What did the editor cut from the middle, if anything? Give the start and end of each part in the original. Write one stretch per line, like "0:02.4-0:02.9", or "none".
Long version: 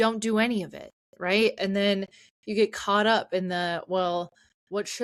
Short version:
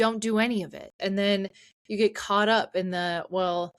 0:01.0-0:01.6